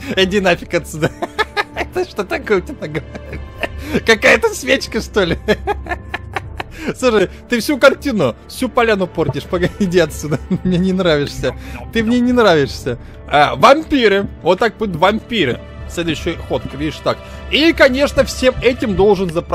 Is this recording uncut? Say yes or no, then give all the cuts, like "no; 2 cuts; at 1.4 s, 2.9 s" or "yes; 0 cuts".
yes; 0 cuts